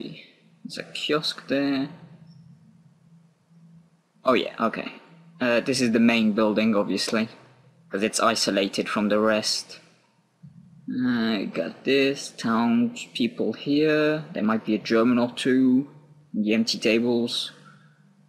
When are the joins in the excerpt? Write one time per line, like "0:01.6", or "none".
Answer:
0:06.1